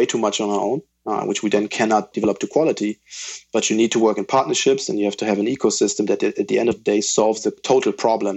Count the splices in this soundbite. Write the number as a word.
two